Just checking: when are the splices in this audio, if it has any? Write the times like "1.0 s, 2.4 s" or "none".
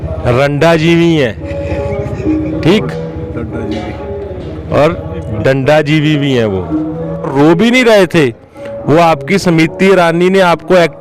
7.3 s